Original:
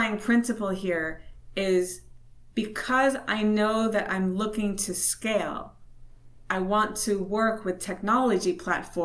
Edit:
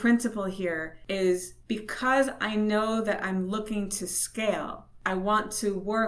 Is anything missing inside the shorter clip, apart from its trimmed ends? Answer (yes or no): yes